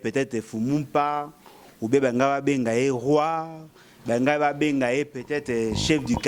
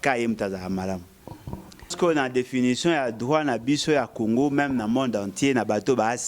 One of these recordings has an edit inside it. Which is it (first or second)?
second